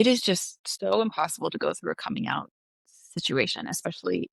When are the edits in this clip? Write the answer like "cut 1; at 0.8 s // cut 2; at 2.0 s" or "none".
none